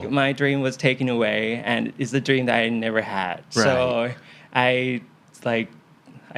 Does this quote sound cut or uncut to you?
uncut